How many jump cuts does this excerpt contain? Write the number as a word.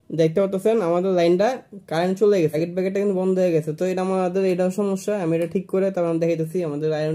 one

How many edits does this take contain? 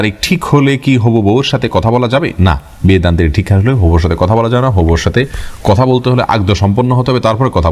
zero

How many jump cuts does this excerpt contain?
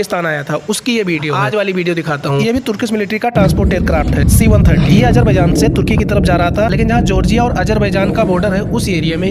zero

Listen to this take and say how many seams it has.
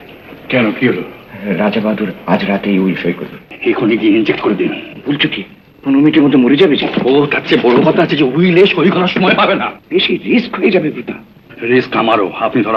two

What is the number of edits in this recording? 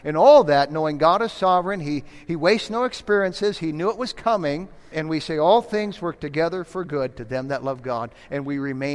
one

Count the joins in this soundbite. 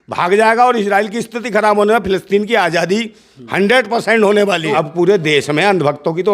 one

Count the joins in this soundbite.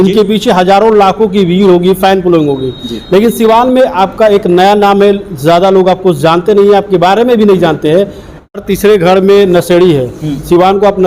one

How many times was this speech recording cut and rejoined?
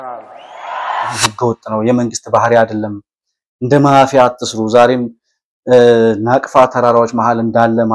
one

